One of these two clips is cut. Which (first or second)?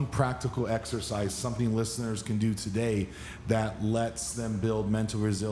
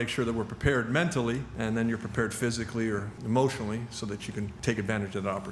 second